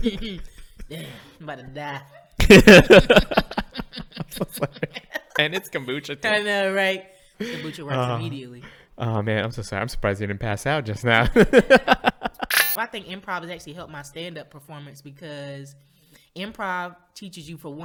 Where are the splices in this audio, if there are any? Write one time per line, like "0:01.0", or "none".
none